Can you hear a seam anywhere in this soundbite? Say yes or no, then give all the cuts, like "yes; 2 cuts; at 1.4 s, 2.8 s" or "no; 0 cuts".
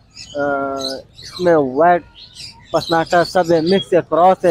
no; 0 cuts